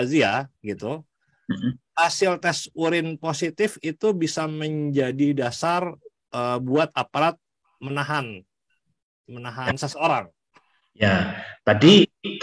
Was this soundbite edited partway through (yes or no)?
no